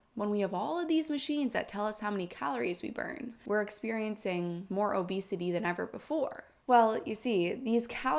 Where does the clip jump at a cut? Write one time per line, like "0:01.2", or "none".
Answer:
0:03.3
0:04.6